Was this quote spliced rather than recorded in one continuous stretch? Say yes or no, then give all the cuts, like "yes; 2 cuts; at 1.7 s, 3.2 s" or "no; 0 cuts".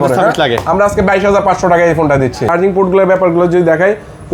yes; 1 cut; at 2.5 s